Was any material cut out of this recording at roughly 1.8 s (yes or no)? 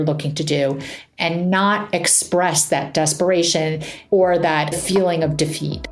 no